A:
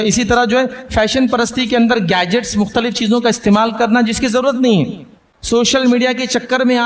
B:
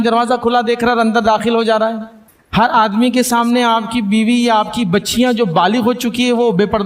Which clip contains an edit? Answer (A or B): A